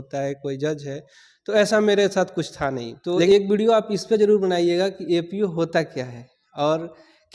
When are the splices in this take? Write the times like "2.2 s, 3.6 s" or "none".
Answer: 3.3 s